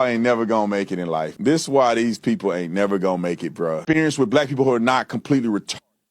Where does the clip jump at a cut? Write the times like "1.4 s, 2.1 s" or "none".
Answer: 3.8 s

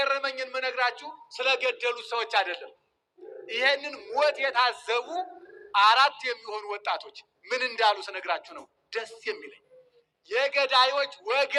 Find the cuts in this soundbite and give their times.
none

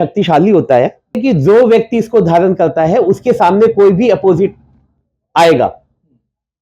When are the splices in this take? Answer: 1.2 s

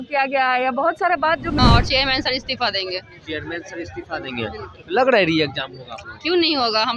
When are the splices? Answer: 1.6 s

